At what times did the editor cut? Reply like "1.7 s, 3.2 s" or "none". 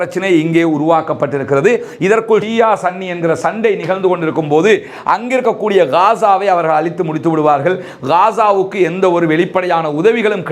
2.5 s